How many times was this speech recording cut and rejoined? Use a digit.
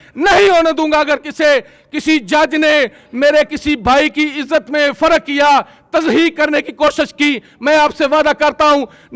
0